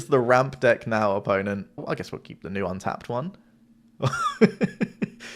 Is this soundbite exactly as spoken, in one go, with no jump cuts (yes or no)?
no